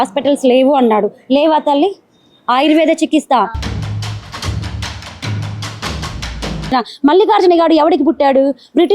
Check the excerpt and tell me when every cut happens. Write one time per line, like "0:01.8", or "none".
0:06.7